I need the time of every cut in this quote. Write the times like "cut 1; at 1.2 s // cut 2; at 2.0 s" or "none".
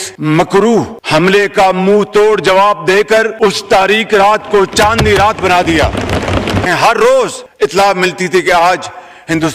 cut 1; at 6.7 s